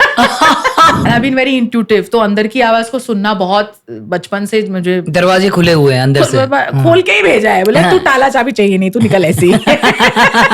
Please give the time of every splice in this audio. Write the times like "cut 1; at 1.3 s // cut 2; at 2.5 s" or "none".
cut 1; at 1.0 s

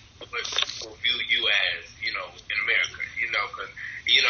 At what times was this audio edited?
none

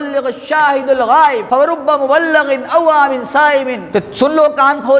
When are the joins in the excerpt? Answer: cut 1; at 1.4 s // cut 2; at 3.8 s

